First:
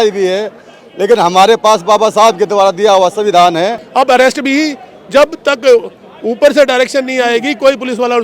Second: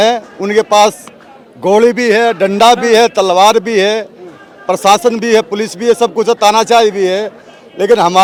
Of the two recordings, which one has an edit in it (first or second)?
first